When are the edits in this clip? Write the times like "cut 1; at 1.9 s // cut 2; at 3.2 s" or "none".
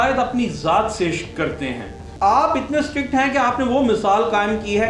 cut 1; at 2.1 s